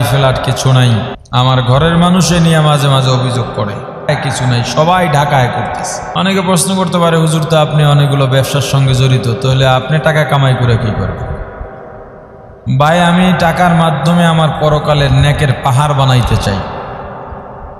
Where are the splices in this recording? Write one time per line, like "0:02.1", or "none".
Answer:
0:01.2
0:04.1
0:06.0